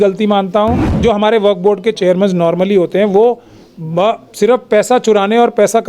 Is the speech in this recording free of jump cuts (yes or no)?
no